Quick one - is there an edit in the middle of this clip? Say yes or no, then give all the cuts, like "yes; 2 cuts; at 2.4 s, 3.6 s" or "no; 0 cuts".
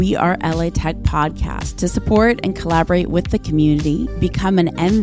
no; 0 cuts